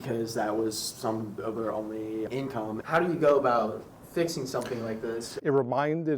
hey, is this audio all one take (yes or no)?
no